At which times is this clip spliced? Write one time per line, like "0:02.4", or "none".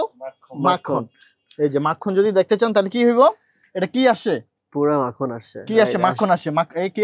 none